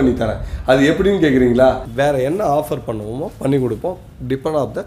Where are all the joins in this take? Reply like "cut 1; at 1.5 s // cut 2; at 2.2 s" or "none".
cut 1; at 1.9 s